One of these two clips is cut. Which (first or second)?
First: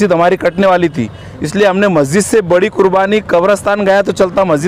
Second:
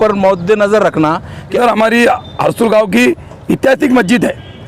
second